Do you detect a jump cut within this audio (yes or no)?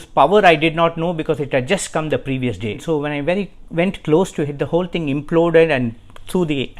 yes